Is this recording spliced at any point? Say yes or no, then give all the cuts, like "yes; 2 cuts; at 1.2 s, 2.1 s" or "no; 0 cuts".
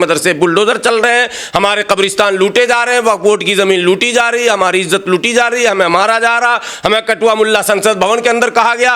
no; 0 cuts